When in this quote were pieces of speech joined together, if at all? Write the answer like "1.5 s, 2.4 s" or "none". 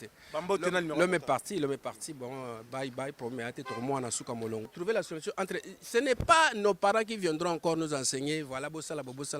4.7 s